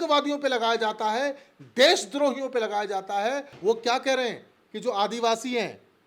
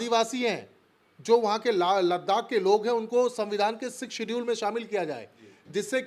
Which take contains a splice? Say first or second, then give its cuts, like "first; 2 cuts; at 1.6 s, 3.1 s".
first; 1 cut; at 3.5 s